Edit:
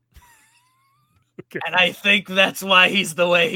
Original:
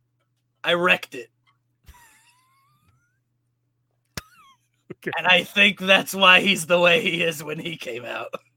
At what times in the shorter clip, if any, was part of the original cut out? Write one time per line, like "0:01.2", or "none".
0:01.1